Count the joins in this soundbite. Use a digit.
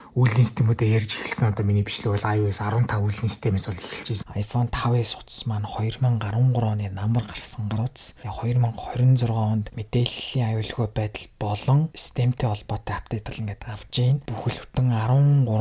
4